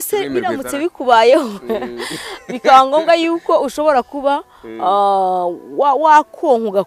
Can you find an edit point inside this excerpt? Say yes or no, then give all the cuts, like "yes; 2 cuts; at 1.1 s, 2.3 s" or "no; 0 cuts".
no; 0 cuts